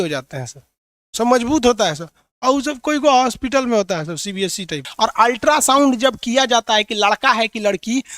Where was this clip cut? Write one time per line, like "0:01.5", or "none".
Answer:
0:04.9